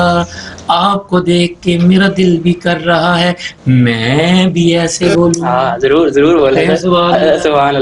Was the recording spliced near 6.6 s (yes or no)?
no